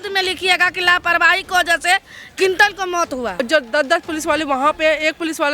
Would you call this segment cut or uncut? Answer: cut